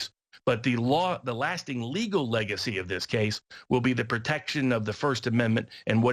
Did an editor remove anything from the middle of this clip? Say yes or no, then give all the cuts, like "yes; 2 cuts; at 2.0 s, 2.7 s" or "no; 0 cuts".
no; 0 cuts